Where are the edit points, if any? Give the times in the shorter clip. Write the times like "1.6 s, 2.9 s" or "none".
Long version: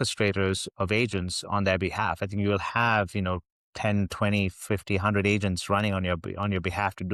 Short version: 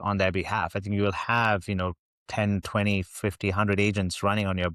none

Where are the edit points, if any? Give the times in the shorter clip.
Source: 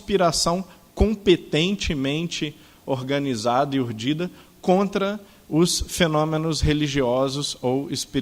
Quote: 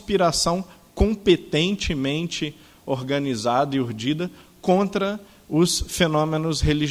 none

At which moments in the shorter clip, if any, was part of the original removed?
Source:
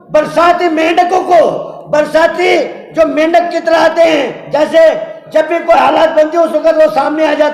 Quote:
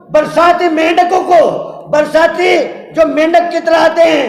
none

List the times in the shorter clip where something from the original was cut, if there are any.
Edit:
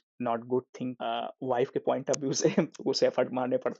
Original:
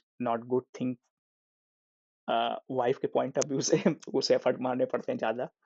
1.0 s

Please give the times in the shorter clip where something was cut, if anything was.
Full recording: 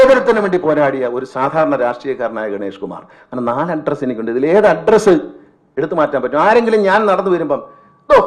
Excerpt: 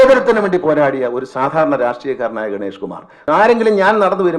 3.2 s

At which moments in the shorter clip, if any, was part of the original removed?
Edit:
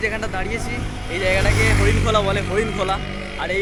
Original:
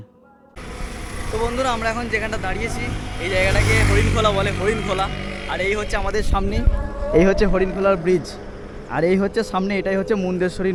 none

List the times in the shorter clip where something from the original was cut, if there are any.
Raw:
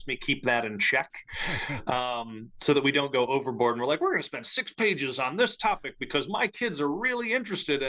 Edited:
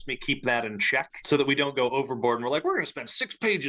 1.2 s

